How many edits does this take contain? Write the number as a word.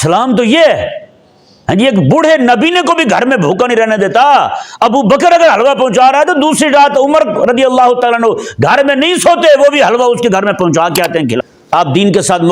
one